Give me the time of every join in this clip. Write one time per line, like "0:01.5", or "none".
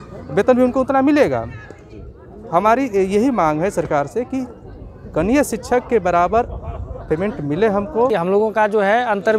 0:08.1